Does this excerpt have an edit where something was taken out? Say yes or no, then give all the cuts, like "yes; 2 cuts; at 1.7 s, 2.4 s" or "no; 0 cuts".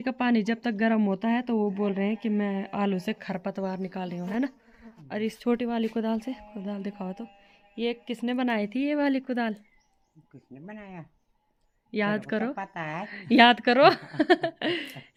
no; 0 cuts